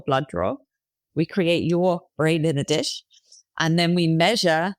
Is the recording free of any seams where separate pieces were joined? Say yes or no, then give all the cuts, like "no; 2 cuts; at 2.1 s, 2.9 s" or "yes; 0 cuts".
yes; 0 cuts